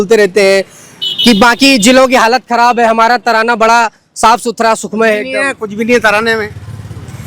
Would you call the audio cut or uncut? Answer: uncut